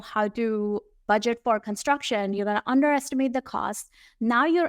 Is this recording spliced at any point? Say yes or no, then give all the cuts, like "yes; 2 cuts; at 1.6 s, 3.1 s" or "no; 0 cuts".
yes; 1 cut; at 1.0 s